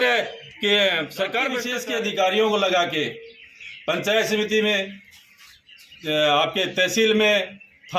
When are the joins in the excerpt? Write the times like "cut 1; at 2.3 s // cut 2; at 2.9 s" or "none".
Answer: cut 1; at 1.7 s